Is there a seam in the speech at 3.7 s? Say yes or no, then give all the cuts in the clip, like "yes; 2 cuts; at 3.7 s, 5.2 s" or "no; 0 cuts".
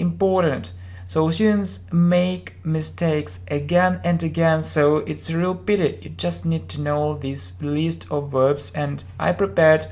yes; 1 cut; at 3.7 s